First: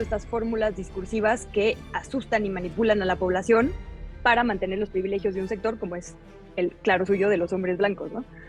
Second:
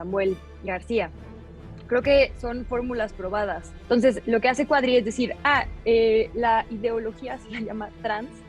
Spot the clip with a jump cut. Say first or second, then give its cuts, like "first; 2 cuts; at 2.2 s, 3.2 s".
second; 1 cut; at 3.7 s